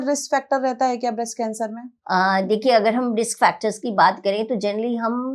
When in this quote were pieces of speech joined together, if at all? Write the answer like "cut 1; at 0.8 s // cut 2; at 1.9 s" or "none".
cut 1; at 1.9 s